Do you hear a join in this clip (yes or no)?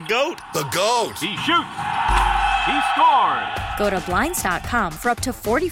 no